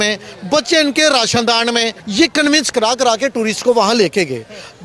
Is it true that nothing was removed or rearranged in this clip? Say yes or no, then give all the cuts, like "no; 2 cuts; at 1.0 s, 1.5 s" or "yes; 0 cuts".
no; 1 cut; at 2.0 s